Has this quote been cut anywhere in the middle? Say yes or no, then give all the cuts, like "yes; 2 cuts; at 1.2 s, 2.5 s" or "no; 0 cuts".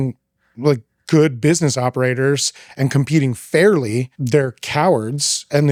no; 0 cuts